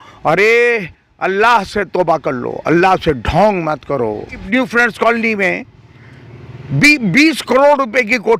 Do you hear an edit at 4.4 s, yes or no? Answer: yes